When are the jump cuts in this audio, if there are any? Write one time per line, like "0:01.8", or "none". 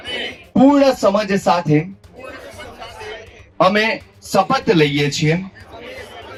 none